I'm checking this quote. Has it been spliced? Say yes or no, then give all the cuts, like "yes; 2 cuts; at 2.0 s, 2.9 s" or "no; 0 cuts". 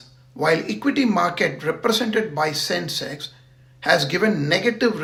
no; 0 cuts